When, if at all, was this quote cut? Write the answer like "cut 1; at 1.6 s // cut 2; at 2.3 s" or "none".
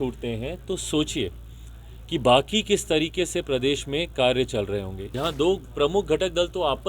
cut 1; at 5.1 s

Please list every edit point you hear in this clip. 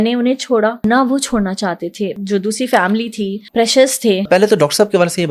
cut 1; at 0.8 s // cut 2; at 2.2 s // cut 3; at 3.4 s // cut 4; at 4.3 s

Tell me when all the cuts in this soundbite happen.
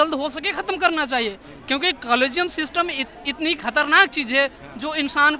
none

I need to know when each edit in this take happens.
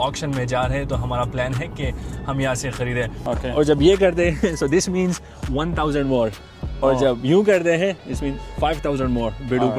cut 1; at 3.2 s

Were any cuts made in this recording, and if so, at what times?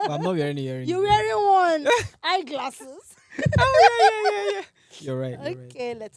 none

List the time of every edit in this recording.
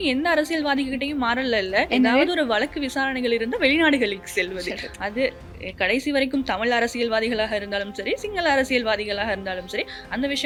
none

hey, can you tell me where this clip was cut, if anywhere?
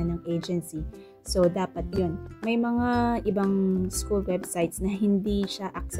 cut 1; at 1.9 s

